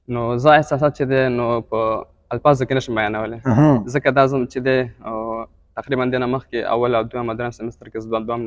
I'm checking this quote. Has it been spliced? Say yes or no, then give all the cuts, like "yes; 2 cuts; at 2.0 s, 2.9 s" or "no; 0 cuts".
no; 0 cuts